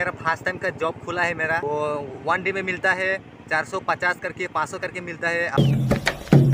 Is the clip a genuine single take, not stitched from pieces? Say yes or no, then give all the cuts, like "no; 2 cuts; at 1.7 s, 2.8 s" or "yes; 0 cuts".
no; 2 cuts; at 1.6 s, 5.6 s